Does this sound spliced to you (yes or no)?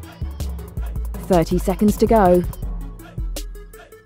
yes